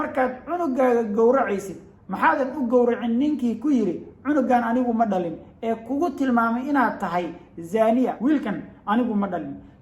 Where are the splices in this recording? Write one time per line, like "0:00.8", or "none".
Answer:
0:08.1